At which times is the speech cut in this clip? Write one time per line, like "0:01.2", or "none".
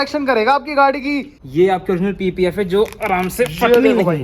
0:01.4

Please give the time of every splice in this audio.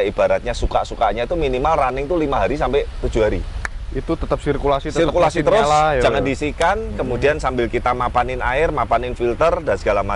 none

